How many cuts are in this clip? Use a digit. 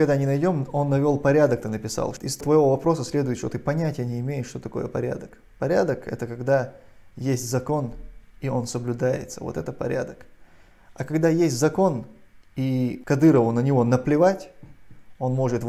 1